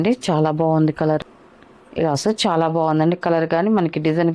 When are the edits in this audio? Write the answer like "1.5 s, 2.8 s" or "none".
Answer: 1.2 s

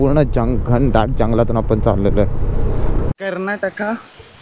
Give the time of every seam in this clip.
3.1 s

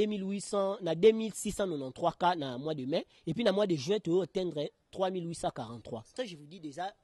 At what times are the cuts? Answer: 6.1 s

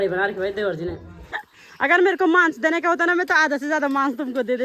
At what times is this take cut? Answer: 1.6 s

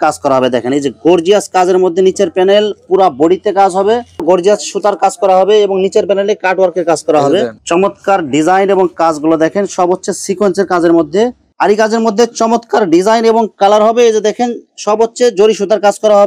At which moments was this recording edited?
4.1 s, 7.6 s, 11.4 s

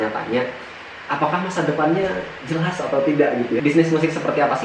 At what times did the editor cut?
3.6 s

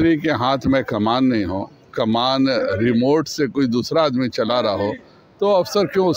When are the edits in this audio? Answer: none

